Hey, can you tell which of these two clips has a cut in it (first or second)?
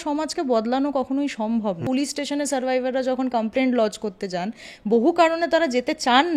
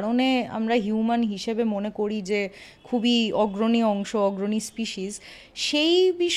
first